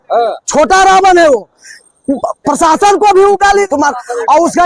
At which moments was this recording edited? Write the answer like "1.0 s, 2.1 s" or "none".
3.7 s